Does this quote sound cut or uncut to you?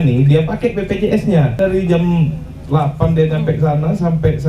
cut